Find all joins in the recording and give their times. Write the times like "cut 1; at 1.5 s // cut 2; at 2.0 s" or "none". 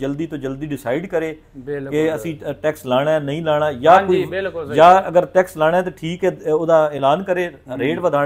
none

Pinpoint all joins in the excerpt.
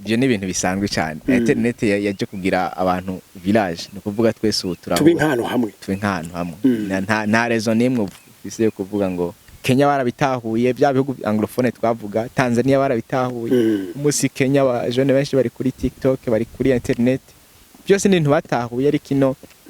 cut 1; at 9.5 s

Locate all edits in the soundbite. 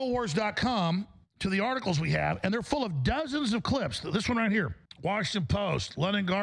cut 1; at 4.8 s

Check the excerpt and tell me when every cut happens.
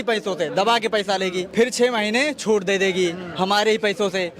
cut 1; at 1.4 s

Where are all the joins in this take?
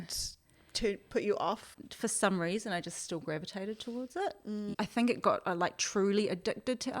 cut 1; at 1.7 s // cut 2; at 4.7 s

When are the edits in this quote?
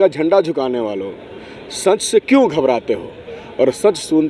none

